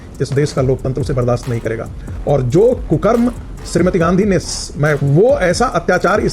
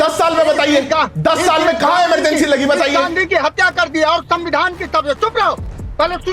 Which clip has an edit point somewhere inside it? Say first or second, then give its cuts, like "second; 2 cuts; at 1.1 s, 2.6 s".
first; 1 cut; at 5.0 s